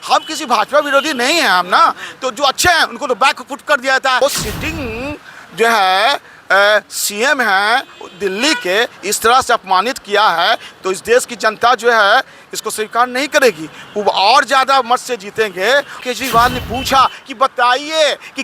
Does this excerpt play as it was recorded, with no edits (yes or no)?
no